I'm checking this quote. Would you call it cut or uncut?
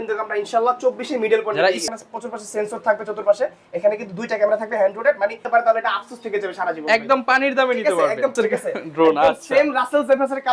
cut